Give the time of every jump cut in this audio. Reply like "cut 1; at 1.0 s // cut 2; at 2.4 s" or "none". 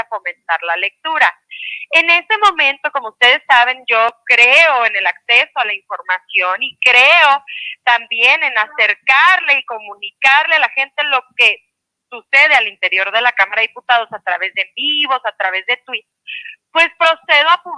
none